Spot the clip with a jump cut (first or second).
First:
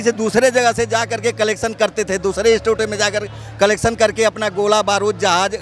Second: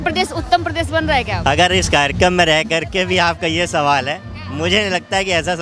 second